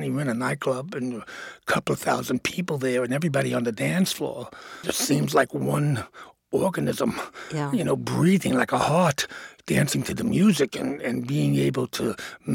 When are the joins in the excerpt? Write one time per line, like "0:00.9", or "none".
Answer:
0:04.7